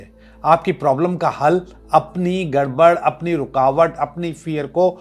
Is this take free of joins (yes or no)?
yes